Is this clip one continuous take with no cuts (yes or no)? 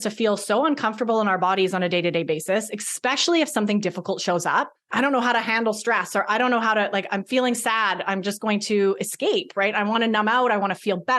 no